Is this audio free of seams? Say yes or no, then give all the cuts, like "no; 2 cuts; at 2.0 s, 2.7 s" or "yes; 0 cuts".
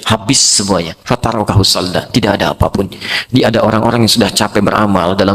yes; 0 cuts